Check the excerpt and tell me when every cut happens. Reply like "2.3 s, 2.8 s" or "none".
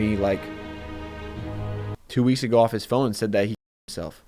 none